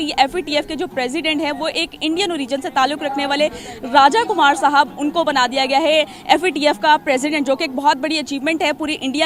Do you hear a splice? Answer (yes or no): no